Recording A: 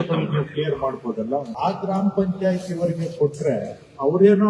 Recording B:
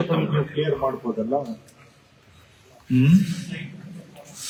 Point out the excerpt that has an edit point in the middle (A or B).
A